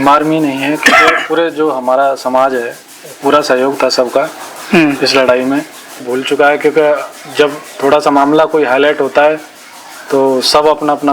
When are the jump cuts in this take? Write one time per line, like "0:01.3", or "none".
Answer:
0:06.1